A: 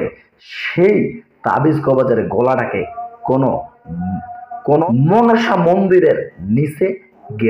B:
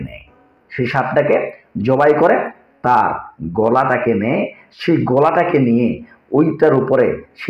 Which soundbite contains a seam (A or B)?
A